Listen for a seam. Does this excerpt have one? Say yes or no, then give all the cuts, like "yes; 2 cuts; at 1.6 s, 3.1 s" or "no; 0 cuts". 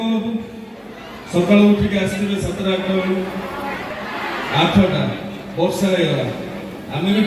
no; 0 cuts